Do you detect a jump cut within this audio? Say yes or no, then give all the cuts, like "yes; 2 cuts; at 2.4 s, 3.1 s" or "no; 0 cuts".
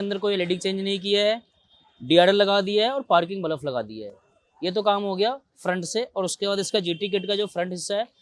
no; 0 cuts